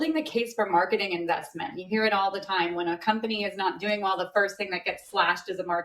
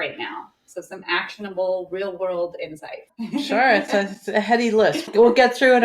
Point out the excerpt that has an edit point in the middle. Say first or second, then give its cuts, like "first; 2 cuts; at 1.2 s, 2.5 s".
second; 2 cuts; at 3.1 s, 5.1 s